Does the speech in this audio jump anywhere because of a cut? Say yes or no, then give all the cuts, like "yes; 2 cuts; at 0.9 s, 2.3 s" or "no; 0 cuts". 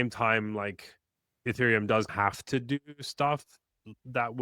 yes; 2 cuts; at 1.4 s, 2.1 s